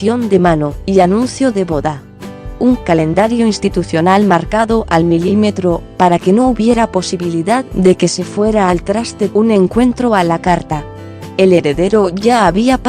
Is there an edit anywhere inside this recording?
yes; 1 cut; at 7.6 s

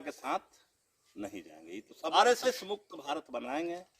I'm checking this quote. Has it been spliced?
yes; 1 cut; at 2.1 s

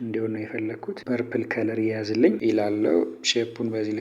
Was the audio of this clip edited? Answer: yes; 2 cuts; at 0.9 s, 2.4 s

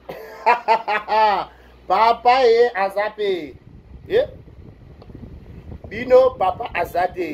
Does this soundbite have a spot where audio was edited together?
no; 0 cuts

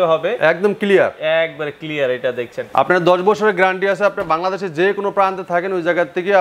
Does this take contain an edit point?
yes; 1 cut; at 2.6 s

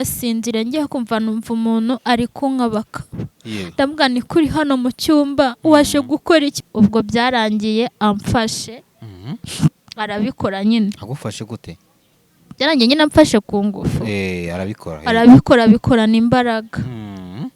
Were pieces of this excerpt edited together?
yes; 1 cut; at 6.6 s

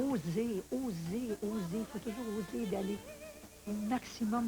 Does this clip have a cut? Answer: no; 0 cuts

